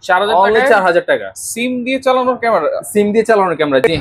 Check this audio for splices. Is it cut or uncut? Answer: uncut